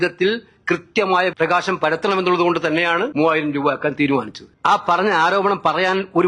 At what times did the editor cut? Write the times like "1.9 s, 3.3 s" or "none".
1.3 s, 3.1 s, 4.4 s